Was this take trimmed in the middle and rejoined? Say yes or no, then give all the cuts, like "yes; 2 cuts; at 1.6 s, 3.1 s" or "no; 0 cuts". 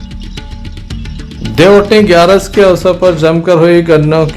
yes; 1 cut; at 1.2 s